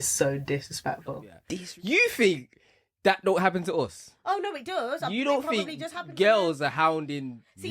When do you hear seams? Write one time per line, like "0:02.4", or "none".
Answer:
0:01.3